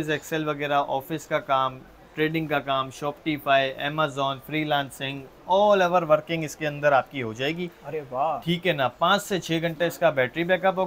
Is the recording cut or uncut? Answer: uncut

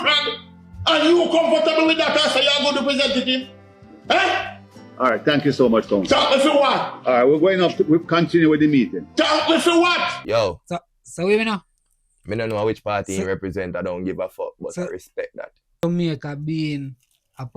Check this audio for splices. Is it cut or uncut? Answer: cut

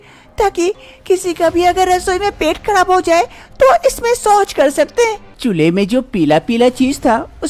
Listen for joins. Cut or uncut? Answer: cut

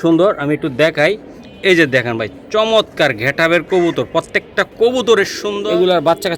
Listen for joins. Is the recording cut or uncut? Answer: cut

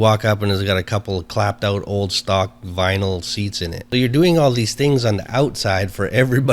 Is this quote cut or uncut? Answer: cut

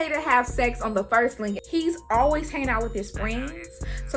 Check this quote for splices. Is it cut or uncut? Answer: cut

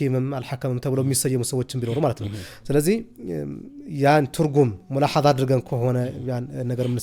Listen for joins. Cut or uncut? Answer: uncut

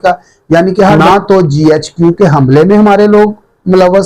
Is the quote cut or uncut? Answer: cut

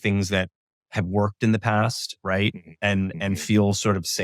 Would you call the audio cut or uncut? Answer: uncut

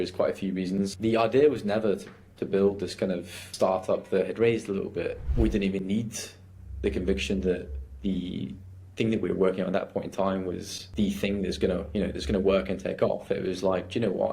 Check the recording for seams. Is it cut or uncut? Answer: cut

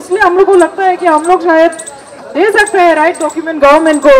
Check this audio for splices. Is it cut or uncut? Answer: uncut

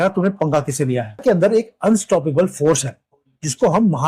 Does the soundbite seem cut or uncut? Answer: uncut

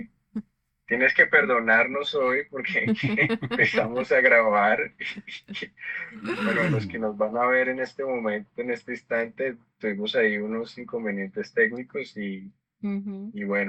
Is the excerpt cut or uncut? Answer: uncut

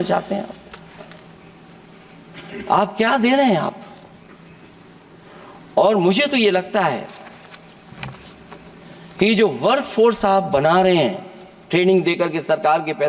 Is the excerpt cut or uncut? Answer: uncut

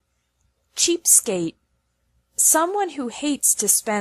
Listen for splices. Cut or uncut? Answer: cut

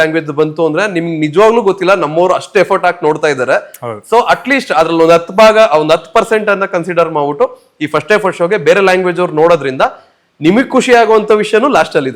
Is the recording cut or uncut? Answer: uncut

